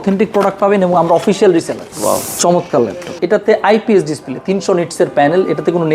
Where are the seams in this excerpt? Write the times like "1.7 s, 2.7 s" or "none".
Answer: 1.8 s, 3.0 s